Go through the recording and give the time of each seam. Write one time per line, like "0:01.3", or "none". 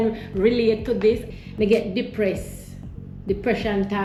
none